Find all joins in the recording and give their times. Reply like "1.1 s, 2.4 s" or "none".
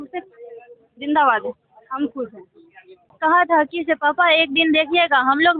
3.1 s